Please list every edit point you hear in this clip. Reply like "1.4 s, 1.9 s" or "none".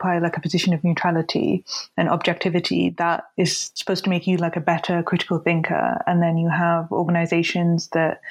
3.7 s

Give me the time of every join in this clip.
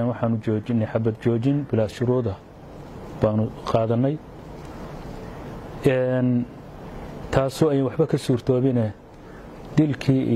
none

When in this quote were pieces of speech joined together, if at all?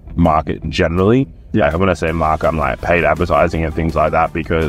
none

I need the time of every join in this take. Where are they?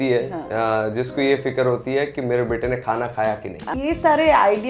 3.7 s

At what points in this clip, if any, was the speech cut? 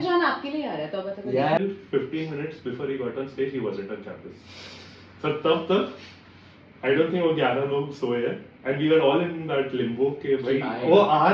1.6 s

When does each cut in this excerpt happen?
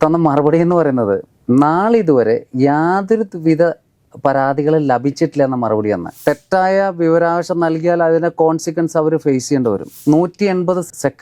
6.1 s, 10.0 s

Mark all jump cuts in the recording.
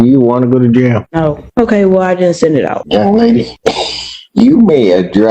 1.3 s, 2.8 s, 3.5 s

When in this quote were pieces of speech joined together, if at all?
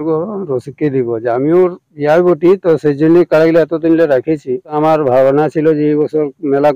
4.8 s

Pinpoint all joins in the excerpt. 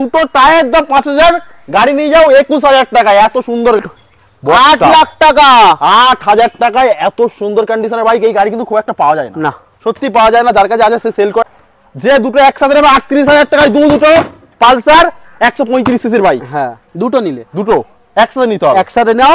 3.8 s, 11.4 s

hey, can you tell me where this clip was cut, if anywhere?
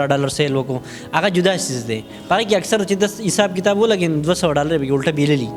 none

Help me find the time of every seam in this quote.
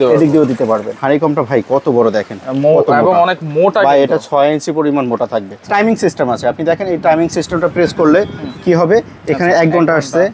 1.0 s, 5.6 s

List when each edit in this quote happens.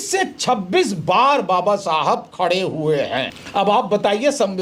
3.4 s

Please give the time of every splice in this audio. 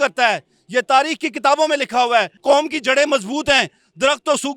2.3 s

